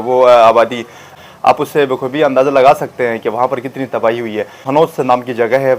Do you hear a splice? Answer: yes; 2 cuts; at 1.1 s, 4.6 s

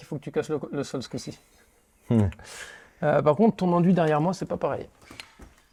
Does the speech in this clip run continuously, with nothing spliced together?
yes; 0 cuts

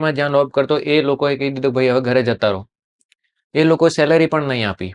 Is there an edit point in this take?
no; 0 cuts

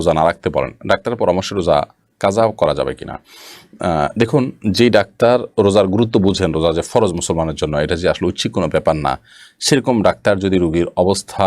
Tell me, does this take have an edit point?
no; 0 cuts

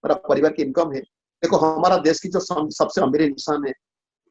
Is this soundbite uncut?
no; 1 cut; at 1.2 s

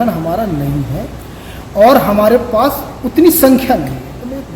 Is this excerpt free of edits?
yes; 0 cuts

